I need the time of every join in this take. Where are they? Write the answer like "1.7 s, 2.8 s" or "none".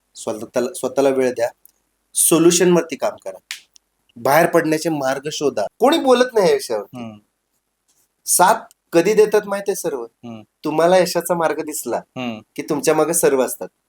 5.7 s